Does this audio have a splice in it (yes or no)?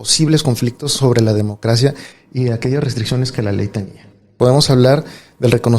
yes